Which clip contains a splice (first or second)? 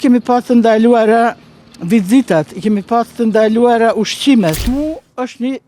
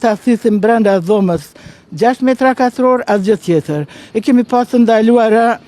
first